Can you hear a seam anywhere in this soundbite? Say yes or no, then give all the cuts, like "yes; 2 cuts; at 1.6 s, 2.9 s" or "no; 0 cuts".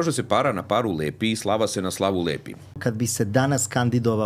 yes; 1 cut; at 2.8 s